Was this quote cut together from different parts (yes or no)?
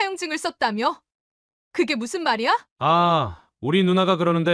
yes